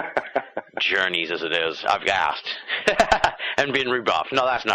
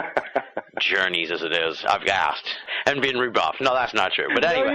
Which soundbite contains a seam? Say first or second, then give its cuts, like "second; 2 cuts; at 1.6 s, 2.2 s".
second; 1 cut; at 2.7 s